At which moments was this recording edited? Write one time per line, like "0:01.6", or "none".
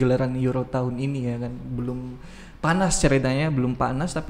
none